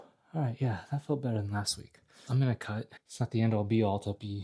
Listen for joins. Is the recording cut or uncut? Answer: cut